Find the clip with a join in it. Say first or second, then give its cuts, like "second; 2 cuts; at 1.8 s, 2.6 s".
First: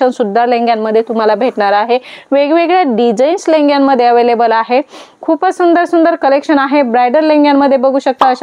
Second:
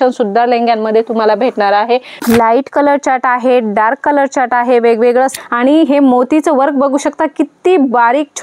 second; 2 cuts; at 2.2 s, 5.4 s